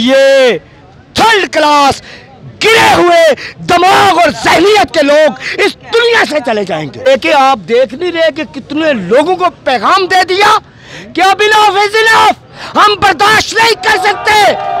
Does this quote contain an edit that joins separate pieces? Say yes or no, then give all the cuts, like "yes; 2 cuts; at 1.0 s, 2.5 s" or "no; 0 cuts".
yes; 1 cut; at 7.1 s